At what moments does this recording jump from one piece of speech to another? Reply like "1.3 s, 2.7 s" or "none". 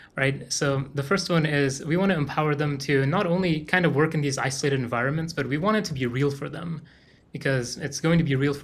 none